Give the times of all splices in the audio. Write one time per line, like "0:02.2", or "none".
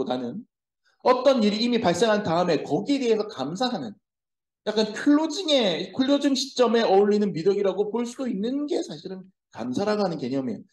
none